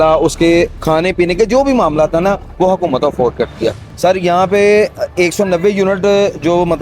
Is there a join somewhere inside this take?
yes; 1 cut; at 3.8 s

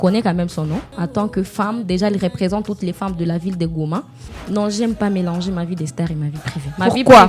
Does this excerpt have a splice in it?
yes; 2 cuts; at 0.9 s, 4.3 s

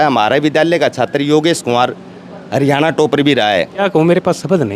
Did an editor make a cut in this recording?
yes; 1 cut; at 3.8 s

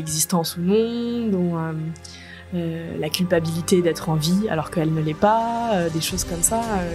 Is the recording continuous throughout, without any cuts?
yes; 0 cuts

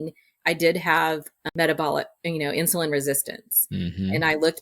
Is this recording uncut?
no; 1 cut; at 1.4 s

